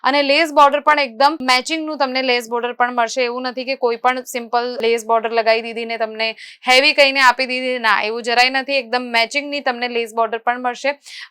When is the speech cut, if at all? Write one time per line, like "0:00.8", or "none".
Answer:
none

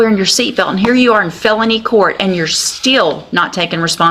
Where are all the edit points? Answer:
none

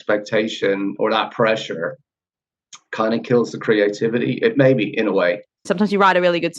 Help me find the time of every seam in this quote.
0:05.6

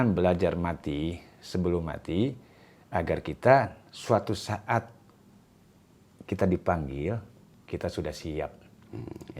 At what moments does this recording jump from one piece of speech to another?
none

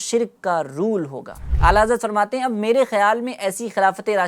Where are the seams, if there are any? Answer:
0:01.4

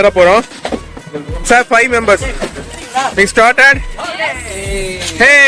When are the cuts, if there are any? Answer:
0:02.8

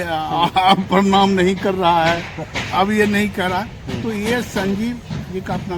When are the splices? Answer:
none

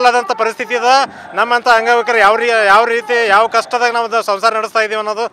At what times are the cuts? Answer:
none

